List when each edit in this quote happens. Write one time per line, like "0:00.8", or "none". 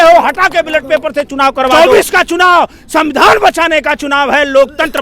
0:01.7